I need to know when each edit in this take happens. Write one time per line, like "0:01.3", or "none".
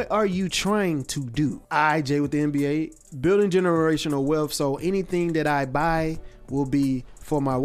0:01.6
0:03.0